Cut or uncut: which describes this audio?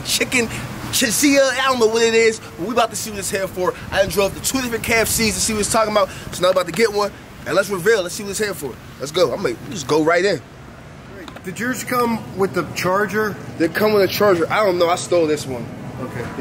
cut